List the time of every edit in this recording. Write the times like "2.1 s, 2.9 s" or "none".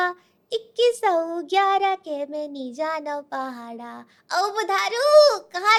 none